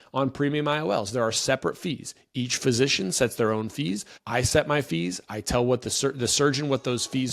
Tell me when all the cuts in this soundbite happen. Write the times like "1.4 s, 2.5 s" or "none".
4.1 s